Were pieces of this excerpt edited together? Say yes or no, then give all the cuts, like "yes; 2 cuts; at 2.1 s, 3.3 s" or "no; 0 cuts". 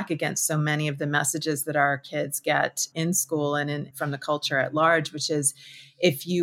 no; 0 cuts